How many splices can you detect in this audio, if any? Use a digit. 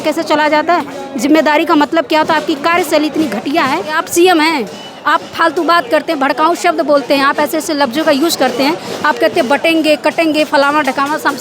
1